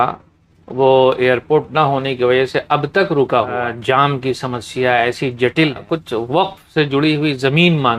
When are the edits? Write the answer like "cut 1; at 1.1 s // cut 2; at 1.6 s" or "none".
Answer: cut 1; at 3.6 s // cut 2; at 5.8 s